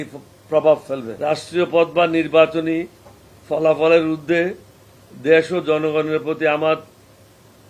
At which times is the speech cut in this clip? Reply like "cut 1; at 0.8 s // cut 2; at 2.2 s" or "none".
cut 1; at 1.1 s